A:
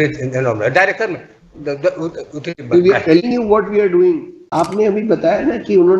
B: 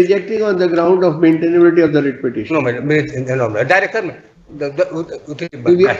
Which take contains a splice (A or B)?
A